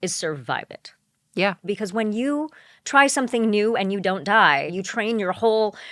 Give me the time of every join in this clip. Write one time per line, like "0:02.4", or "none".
0:01.7
0:04.8